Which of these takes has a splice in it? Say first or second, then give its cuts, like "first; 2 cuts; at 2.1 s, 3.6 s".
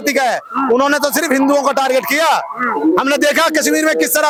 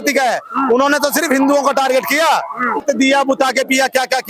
second; 1 cut; at 2.8 s